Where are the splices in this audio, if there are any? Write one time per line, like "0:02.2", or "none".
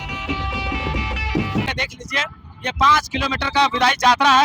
0:01.7